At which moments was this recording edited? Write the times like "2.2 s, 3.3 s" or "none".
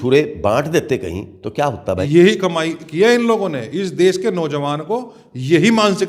2.0 s